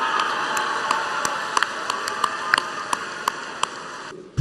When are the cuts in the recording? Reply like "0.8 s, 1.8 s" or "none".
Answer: 1.6 s